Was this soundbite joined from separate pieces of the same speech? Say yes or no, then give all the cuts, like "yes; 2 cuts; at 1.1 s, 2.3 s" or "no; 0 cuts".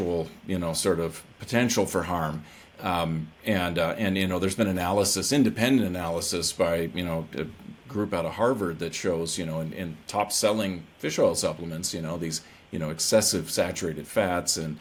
no; 0 cuts